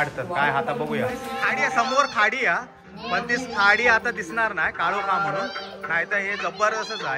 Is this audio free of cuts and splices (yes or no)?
no